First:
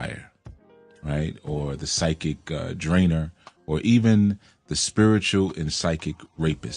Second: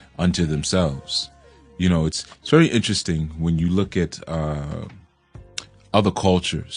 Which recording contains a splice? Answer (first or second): first